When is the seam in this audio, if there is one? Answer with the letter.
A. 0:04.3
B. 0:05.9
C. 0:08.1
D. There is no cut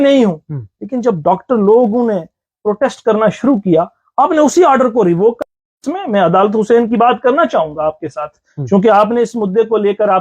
B